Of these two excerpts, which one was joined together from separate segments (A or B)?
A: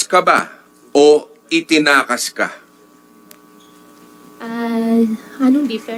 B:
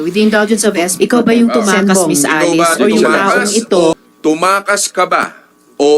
B